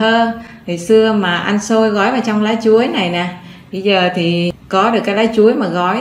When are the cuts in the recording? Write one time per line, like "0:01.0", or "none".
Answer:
0:04.5